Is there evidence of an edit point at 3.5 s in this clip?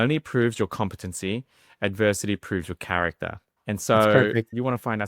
yes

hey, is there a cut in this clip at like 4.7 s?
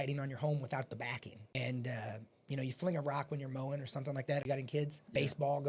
yes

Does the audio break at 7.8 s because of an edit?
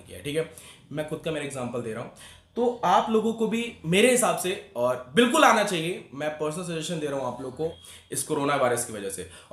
yes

